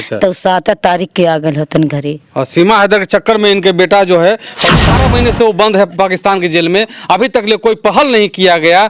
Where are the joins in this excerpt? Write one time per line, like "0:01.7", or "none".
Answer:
0:04.9